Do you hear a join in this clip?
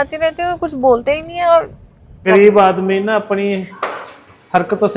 yes; 1 cut; at 2.2 s

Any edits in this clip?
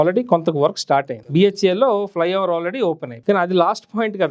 yes; 2 cuts; at 1.2 s, 3.1 s

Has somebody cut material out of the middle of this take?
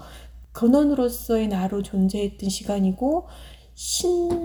no; 0 cuts

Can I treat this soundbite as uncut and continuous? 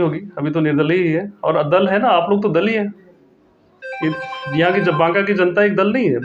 yes; 0 cuts

